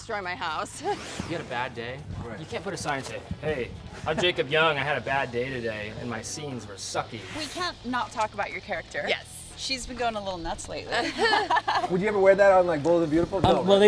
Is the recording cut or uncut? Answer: cut